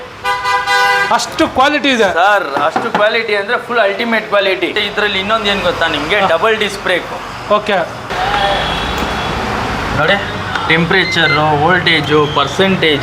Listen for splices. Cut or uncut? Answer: cut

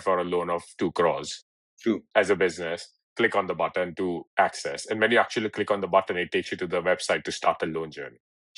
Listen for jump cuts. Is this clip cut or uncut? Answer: uncut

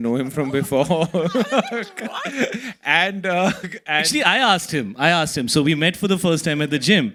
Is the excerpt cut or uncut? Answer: uncut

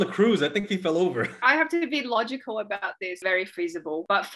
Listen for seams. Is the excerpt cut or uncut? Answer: cut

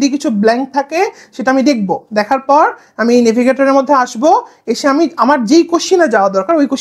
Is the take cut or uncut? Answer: uncut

